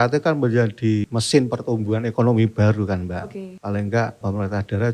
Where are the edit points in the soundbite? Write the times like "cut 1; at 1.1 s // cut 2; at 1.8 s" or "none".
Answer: cut 1; at 1.0 s // cut 2; at 3.4 s // cut 3; at 4.2 s